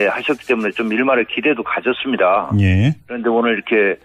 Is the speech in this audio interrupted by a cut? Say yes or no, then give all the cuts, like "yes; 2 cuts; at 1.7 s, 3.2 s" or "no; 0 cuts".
no; 0 cuts